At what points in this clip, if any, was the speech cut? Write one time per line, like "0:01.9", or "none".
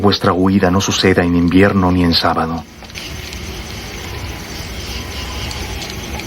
0:03.0